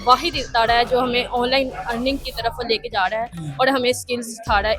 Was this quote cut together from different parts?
no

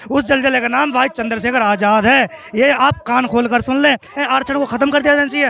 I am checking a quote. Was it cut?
yes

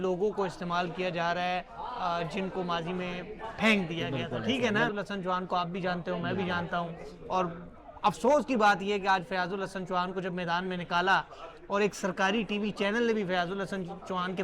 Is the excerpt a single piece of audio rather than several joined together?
no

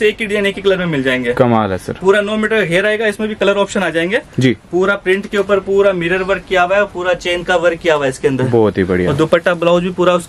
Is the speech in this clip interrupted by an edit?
no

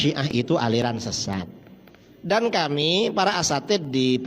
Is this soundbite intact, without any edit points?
no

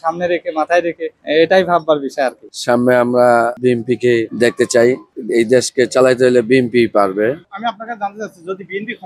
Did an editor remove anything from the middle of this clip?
no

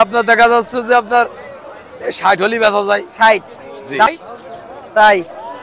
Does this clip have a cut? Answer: yes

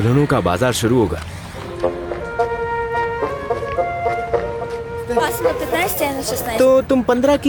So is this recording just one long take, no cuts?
yes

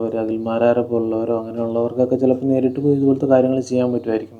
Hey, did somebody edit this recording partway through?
no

